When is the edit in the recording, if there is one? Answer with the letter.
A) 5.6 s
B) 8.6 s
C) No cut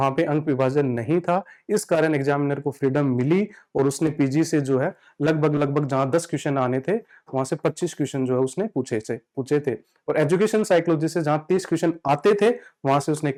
C